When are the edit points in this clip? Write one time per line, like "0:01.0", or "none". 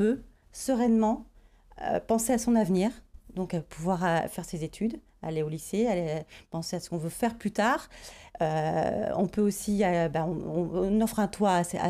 none